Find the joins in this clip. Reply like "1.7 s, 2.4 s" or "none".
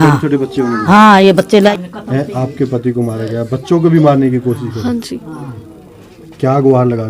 1.7 s